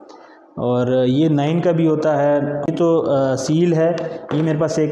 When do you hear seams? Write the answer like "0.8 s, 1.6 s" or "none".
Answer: 2.7 s

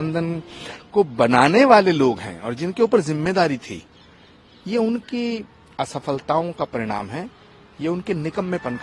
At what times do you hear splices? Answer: none

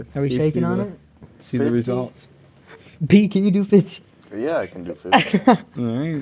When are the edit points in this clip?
none

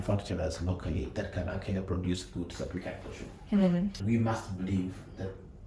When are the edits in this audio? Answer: 4.0 s

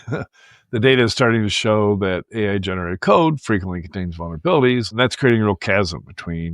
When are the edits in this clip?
5.0 s

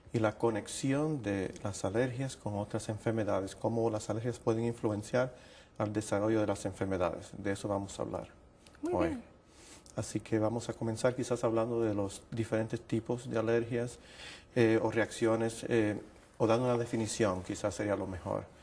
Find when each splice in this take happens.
none

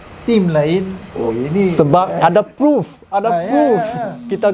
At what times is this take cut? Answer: none

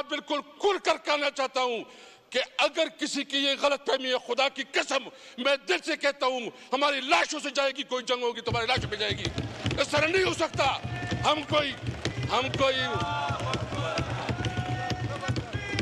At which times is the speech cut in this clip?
none

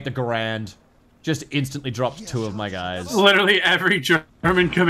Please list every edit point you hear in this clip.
none

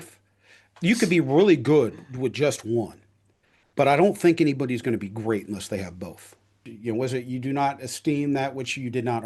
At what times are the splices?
6.7 s

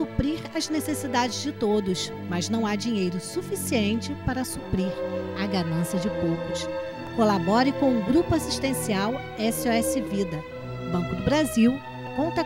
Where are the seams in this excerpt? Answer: none

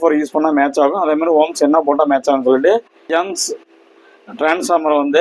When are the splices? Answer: 3.0 s

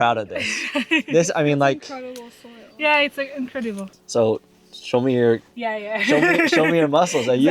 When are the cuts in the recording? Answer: 3.9 s

